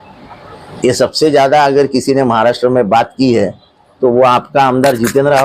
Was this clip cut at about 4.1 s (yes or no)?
no